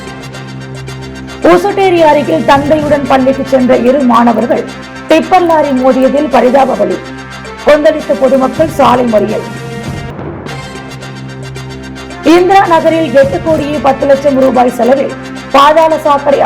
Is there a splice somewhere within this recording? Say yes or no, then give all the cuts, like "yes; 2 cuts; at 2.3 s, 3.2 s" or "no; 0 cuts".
yes; 1 cut; at 1.1 s